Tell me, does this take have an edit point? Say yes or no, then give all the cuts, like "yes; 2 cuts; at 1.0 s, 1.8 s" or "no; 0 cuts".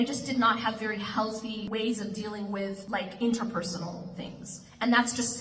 yes; 2 cuts; at 1.7 s, 2.8 s